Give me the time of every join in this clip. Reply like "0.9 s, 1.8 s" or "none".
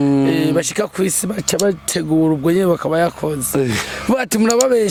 none